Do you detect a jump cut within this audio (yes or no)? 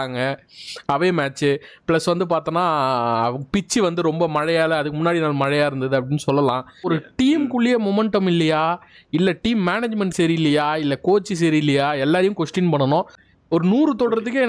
yes